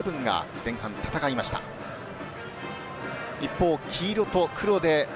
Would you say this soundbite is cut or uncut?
cut